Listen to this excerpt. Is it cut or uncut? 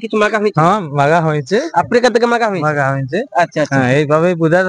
uncut